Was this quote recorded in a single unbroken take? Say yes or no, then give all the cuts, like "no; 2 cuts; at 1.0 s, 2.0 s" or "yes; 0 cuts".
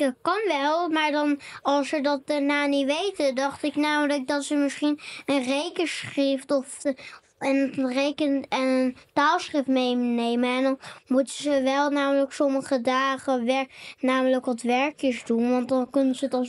yes; 0 cuts